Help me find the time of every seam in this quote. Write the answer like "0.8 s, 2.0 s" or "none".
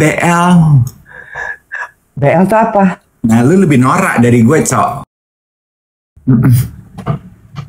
5.8 s